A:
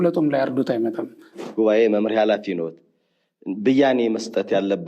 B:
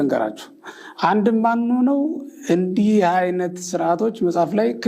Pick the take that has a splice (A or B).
A